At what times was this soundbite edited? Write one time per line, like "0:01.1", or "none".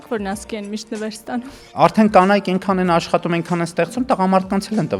0:01.7